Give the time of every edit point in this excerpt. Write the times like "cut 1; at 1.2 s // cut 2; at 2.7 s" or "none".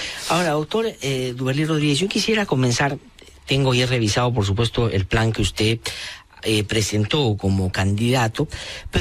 cut 1; at 6.0 s